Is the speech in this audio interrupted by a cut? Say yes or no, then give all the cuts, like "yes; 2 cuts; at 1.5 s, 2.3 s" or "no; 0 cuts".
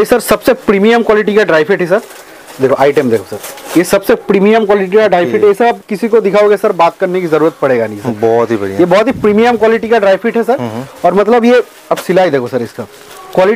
no; 0 cuts